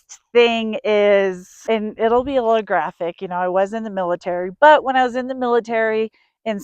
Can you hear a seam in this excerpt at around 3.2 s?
no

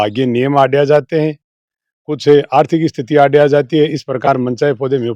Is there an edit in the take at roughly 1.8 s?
no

